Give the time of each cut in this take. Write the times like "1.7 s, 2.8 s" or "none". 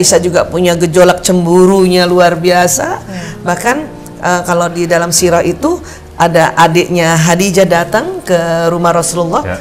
none